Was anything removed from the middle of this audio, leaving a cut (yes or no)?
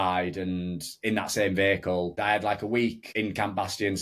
yes